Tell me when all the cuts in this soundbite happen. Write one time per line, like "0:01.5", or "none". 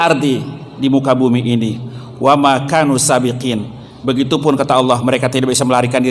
none